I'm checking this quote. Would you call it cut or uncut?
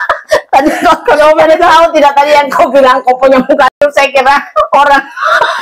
uncut